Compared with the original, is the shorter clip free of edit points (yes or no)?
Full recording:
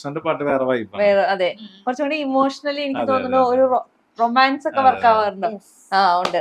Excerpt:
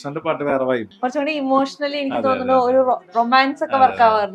no